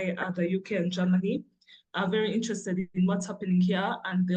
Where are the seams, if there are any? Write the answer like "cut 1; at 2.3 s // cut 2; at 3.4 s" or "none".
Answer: none